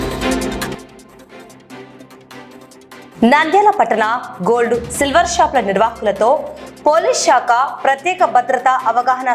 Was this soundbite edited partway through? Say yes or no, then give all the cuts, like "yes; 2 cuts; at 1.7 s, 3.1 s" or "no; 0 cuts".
yes; 2 cuts; at 0.8 s, 3.1 s